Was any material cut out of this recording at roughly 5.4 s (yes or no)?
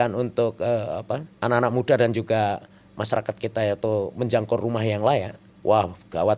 yes